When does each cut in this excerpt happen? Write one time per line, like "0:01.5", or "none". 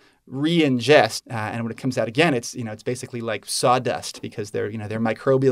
0:01.2